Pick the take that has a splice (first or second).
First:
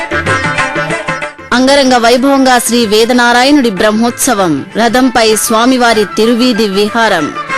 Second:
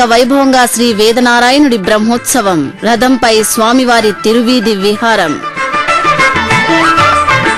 first